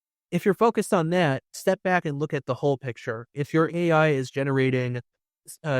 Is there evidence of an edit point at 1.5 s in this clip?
yes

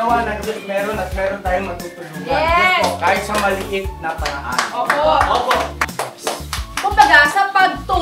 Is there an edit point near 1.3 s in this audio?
no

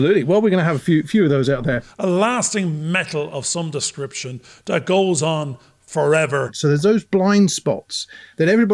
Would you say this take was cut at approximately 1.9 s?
yes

